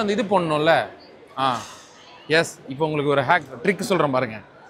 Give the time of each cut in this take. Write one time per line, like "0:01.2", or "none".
none